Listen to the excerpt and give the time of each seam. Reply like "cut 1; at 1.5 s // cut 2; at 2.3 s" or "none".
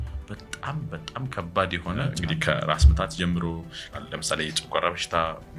cut 1; at 2.1 s // cut 2; at 3.9 s